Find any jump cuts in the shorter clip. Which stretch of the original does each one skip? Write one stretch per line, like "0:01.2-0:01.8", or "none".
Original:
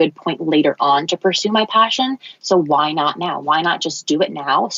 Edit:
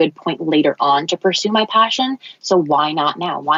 none